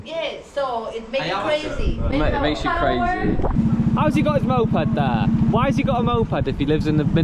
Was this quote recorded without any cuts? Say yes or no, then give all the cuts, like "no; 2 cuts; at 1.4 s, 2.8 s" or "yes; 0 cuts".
no; 2 cuts; at 3.6 s, 5.3 s